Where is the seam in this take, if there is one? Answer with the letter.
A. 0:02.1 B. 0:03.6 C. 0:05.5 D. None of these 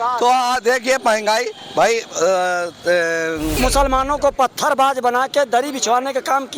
B